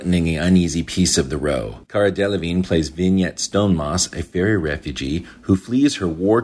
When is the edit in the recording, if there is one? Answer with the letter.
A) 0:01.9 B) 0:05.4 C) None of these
C